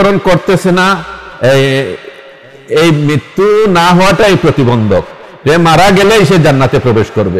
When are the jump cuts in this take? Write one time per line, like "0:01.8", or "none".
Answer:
none